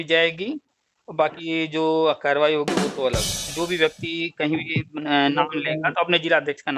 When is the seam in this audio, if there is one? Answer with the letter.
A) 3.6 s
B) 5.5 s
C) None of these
A